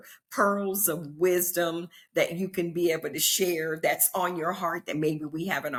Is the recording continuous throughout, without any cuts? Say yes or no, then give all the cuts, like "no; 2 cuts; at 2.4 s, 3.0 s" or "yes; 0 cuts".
yes; 0 cuts